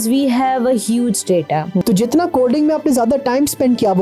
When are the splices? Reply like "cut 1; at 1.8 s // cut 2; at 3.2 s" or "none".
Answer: cut 1; at 1.8 s